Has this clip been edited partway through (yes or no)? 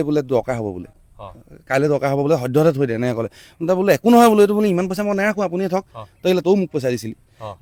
no